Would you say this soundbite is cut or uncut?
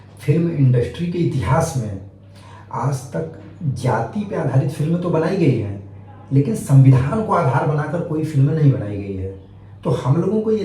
uncut